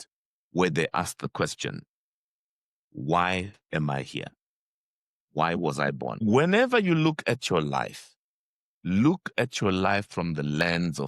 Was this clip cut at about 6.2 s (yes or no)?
yes